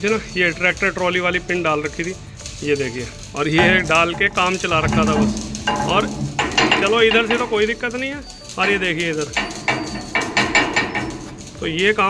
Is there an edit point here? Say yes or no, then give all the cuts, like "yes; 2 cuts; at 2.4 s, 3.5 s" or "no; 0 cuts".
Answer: no; 0 cuts